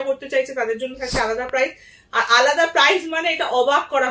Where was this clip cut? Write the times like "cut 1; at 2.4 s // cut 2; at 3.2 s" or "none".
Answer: none